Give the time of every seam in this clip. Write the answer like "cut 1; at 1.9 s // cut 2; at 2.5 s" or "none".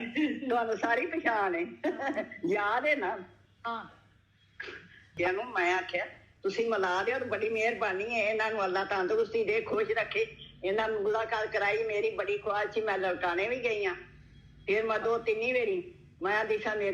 cut 1; at 5.1 s

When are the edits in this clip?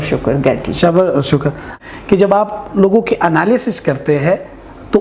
cut 1; at 1.7 s

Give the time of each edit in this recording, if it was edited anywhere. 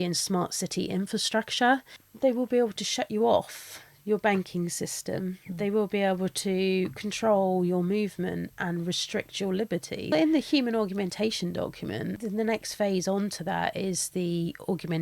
cut 1; at 2.0 s // cut 2; at 10.1 s // cut 3; at 12.2 s

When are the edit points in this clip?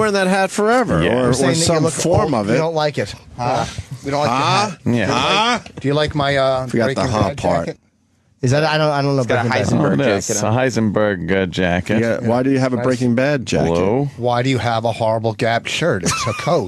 cut 1; at 6.7 s

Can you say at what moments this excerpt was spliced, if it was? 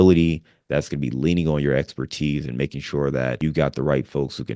cut 1; at 3.4 s

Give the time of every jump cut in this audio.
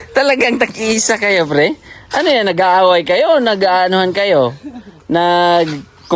none

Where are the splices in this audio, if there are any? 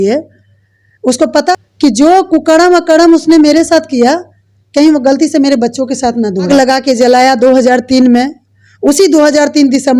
cut 1; at 1.5 s // cut 2; at 6.5 s

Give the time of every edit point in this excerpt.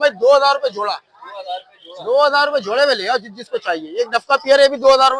none

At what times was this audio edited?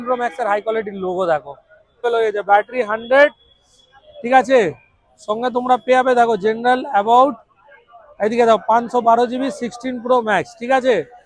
cut 1; at 2.0 s

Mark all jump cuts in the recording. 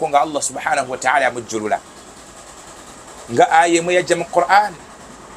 none

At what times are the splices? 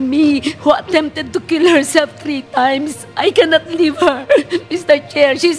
none

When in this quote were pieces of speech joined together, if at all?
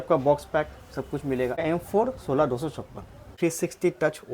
cut 1; at 1.6 s // cut 2; at 3.3 s

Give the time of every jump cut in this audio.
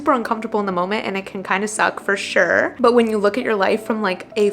cut 1; at 2.7 s

